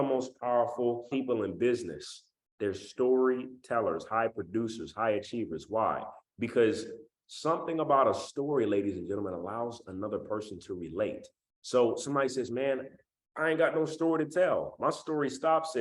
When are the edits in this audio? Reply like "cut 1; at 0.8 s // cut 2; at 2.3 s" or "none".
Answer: cut 1; at 1.1 s

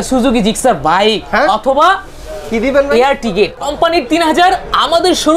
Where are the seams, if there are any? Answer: cut 1; at 3.6 s

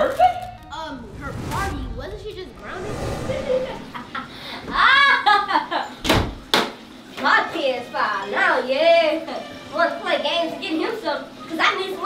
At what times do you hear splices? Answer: none

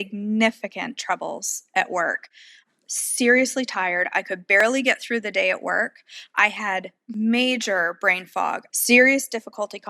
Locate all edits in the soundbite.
cut 1; at 7.0 s // cut 2; at 8.6 s

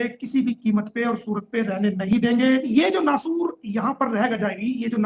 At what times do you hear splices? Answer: cut 1; at 2.7 s

